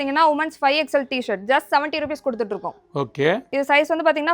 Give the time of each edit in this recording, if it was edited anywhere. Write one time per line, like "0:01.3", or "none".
none